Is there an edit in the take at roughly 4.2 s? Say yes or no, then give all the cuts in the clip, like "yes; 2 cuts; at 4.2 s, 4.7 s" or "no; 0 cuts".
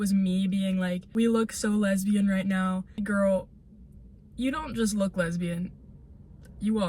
no; 2 cuts; at 1.0 s, 3.0 s